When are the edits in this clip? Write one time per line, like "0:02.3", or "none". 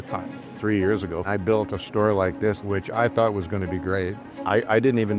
0:01.2
0:02.6
0:04.3